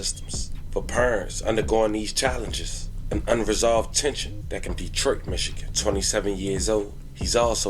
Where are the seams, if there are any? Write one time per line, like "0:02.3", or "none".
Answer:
0:04.8